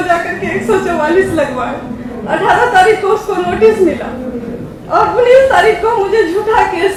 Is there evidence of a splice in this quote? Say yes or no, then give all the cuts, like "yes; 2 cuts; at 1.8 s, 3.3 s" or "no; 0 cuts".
no; 0 cuts